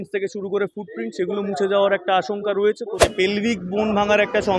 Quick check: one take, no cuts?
no; 1 cut; at 3.1 s

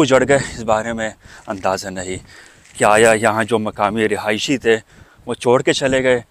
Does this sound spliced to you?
no; 0 cuts

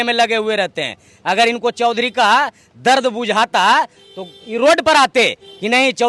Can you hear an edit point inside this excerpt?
no; 0 cuts

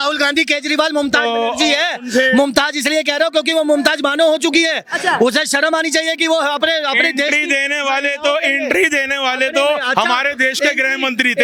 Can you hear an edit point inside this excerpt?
no; 0 cuts

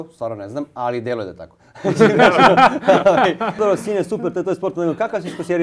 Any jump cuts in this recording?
yes; 1 cut; at 3.6 s

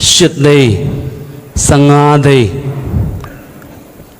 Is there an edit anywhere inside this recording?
no; 0 cuts

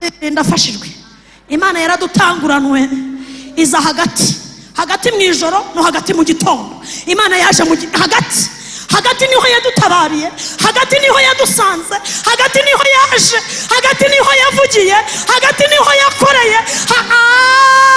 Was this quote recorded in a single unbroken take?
yes; 0 cuts

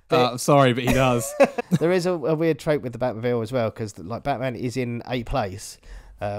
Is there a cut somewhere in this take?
yes; 1 cut; at 1.6 s

